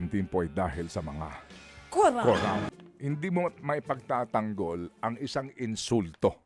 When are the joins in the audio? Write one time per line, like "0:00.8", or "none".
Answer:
0:02.7